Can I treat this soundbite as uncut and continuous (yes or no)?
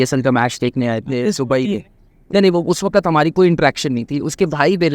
yes